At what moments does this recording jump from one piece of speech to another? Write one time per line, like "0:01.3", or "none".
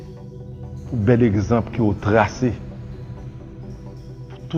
none